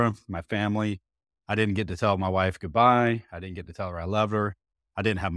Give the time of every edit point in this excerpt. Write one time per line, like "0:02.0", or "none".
none